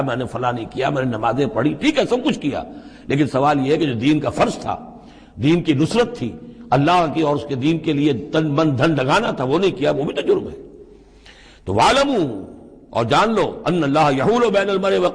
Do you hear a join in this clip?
no; 0 cuts

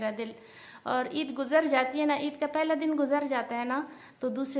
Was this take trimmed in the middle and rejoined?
no; 0 cuts

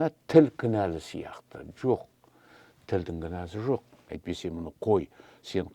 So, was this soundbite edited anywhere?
yes; 1 cut; at 4.1 s

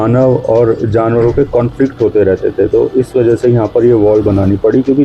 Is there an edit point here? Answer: no; 0 cuts

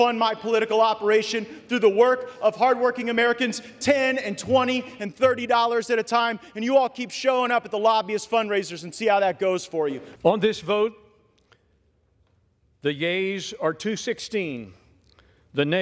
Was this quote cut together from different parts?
yes; 1 cut; at 10.1 s

